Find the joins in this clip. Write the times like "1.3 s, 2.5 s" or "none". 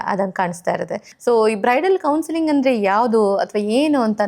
1.0 s